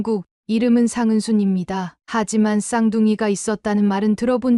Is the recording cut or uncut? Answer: uncut